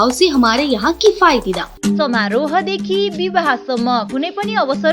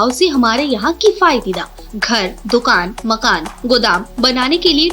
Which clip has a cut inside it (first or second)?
first